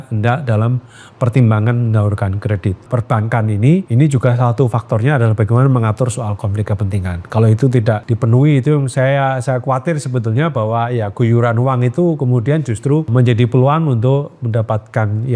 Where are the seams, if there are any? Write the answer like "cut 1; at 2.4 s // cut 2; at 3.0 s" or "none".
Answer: cut 1; at 2.8 s // cut 2; at 3.9 s // cut 3; at 8.1 s // cut 4; at 13.1 s